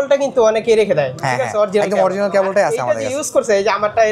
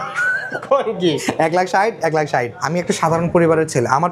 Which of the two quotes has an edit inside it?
second; 1 cut; at 2.6 s

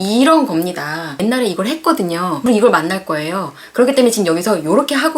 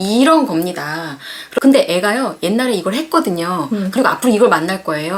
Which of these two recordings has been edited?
first; 2 cuts; at 1.1 s, 2.4 s

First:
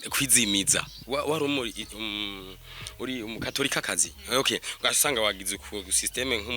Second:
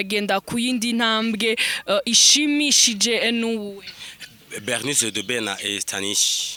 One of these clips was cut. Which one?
first; 1 cut; at 0.9 s

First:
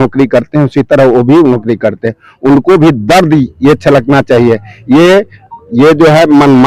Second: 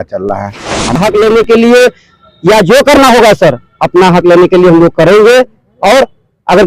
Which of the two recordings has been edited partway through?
second; 1 cut; at 1.0 s

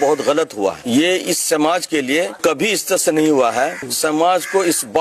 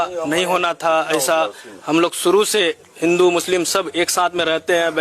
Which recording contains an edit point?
first; 3 cuts; at 0.8 s, 2.4 s, 3.8 s

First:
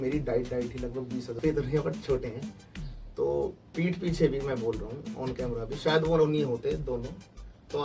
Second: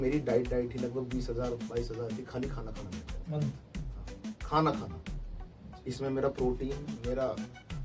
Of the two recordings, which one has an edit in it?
first; 1 cut; at 1.4 s

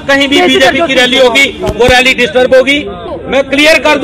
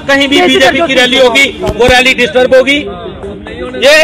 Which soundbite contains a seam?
first; 1 cut; at 3.1 s

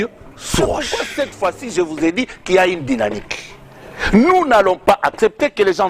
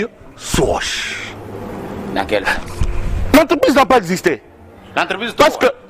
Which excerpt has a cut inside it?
first; 1 cut; at 1.0 s

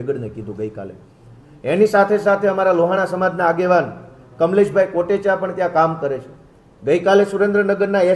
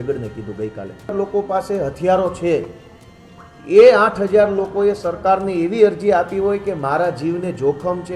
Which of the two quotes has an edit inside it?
second; 1 cut; at 1.1 s

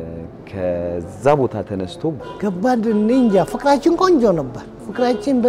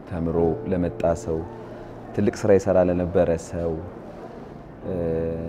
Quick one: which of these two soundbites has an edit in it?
first; 1 cut; at 2.2 s

